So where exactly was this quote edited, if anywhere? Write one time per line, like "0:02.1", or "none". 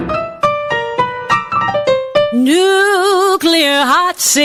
none